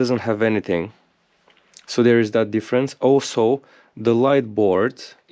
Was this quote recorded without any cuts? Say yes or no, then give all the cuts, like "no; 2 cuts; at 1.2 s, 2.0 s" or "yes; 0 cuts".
yes; 0 cuts